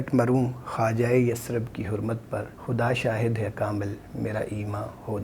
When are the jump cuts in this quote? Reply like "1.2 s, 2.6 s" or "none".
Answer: 2.5 s